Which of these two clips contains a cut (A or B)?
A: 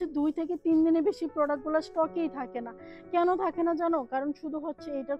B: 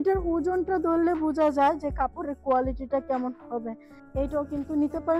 B